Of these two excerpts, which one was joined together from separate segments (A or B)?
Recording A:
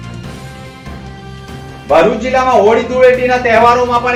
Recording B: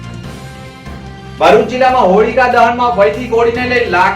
B